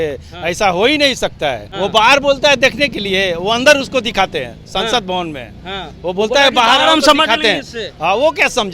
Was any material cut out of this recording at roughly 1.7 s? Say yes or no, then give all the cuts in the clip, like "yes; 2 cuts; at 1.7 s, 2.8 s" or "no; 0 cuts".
yes; 1 cut; at 1.7 s